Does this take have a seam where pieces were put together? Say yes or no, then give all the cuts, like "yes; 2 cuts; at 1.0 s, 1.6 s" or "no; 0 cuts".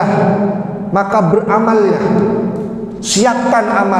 no; 0 cuts